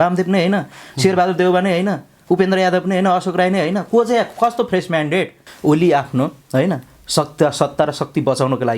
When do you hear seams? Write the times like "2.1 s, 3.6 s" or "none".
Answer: 5.4 s